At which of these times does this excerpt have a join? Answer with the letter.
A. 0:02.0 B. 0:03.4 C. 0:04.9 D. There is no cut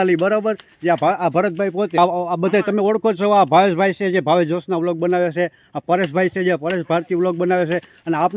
A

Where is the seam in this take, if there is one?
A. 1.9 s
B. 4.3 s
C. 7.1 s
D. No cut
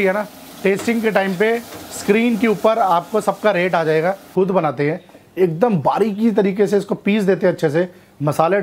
B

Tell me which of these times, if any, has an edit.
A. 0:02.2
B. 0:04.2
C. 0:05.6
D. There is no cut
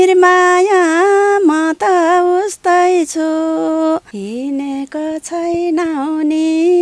B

